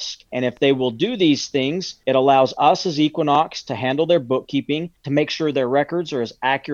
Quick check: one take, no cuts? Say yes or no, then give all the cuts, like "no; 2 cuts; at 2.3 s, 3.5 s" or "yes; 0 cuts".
yes; 0 cuts